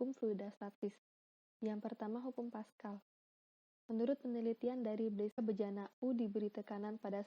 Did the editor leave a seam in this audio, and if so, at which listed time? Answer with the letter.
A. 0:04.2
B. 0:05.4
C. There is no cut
B